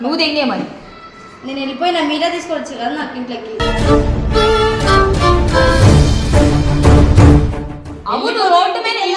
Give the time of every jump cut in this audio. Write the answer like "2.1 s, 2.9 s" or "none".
none